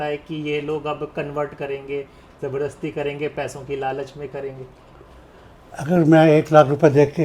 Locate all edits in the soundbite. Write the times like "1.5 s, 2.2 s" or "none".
none